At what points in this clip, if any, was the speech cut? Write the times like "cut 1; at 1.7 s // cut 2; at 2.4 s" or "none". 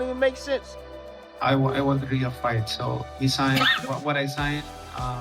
cut 1; at 1.1 s